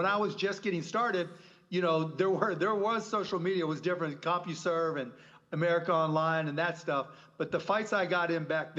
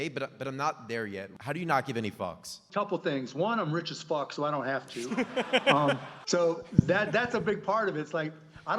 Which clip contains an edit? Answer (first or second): second